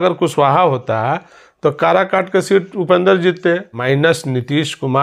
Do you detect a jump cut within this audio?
yes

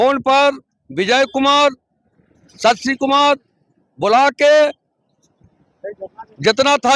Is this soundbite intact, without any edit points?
yes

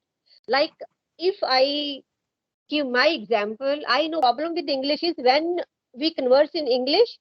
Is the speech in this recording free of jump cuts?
no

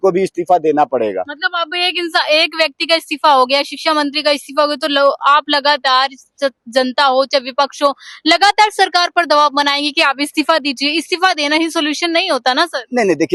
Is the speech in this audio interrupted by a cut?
no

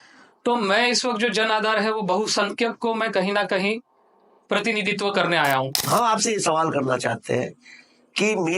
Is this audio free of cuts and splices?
no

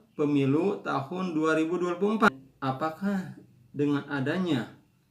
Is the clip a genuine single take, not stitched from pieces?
no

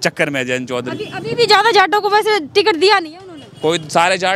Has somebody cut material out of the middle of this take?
no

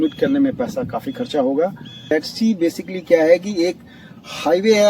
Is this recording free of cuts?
no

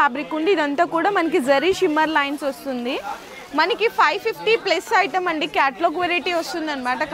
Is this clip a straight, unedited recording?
yes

